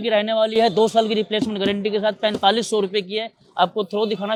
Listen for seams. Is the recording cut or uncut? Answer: uncut